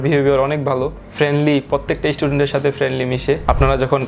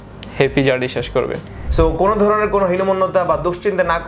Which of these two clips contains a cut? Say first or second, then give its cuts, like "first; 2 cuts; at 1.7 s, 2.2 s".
second; 1 cut; at 1.7 s